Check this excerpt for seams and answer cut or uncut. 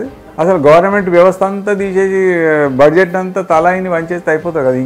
uncut